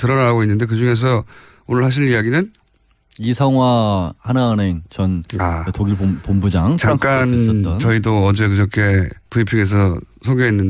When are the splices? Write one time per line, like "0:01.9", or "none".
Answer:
0:06.5

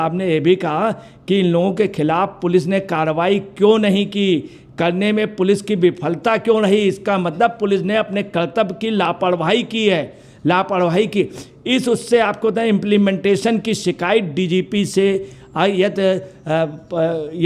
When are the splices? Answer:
none

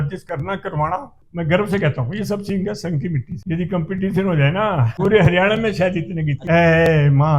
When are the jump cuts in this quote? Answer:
0:01.2
0:03.3
0:04.9
0:06.3

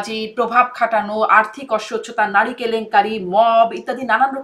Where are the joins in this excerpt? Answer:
none

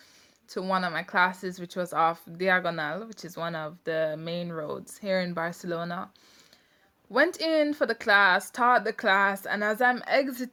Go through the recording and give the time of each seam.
none

